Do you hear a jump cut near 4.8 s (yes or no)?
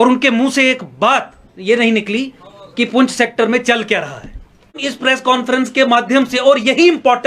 yes